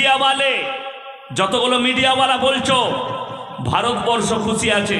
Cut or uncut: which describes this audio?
uncut